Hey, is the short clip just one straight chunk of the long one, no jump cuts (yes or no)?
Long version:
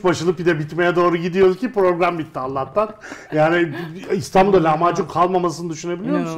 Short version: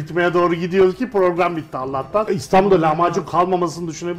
no